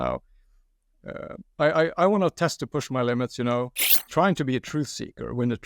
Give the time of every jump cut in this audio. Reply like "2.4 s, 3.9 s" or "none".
3.8 s